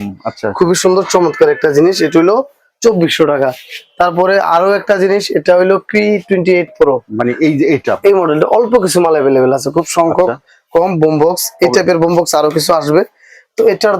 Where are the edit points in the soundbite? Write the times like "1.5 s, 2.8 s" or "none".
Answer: none